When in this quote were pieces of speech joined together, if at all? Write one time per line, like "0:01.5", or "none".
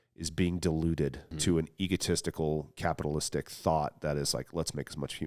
0:01.3
0:02.7